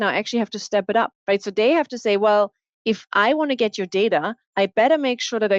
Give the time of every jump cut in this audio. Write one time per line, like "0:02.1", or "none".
0:01.2
0:04.4